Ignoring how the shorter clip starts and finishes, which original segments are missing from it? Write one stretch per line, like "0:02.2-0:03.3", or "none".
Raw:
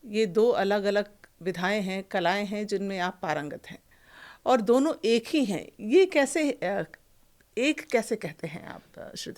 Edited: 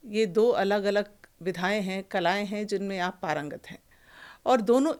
none